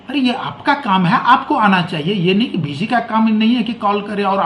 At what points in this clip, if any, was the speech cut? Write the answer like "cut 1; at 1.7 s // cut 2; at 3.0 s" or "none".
none